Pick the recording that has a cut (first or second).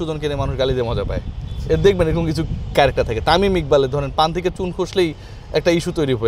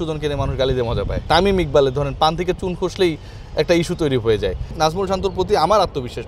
second